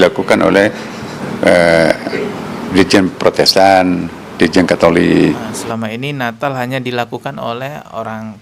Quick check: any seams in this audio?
no; 0 cuts

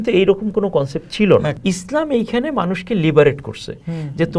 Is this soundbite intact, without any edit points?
no; 1 cut; at 1.5 s

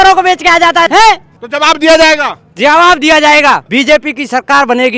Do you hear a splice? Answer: yes; 2 cuts; at 0.9 s, 3.6 s

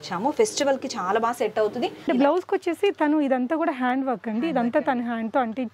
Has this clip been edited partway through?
yes; 1 cut; at 2.1 s

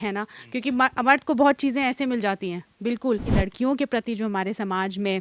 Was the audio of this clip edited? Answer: yes; 1 cut; at 3.3 s

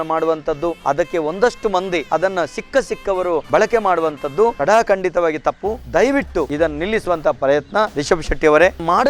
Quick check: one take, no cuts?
yes; 0 cuts

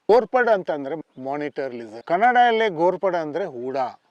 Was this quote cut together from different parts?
yes; 1 cut; at 1.0 s

